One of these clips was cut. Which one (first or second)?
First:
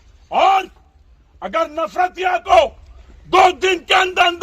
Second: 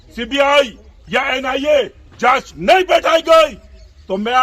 first